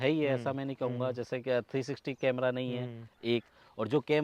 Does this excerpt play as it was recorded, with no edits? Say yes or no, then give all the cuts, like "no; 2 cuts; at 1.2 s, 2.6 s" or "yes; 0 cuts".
yes; 0 cuts